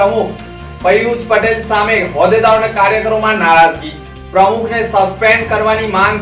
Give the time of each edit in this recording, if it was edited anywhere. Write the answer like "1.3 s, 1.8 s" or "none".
none